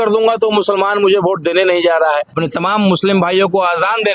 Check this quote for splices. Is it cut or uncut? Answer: cut